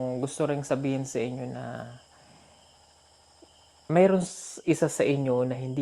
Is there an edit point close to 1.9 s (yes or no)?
no